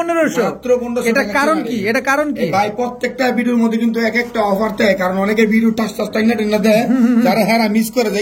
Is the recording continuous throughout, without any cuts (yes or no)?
yes